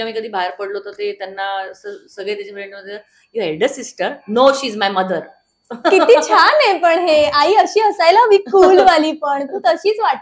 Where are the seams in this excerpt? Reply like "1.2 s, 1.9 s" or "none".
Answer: none